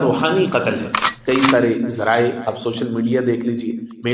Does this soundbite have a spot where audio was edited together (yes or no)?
yes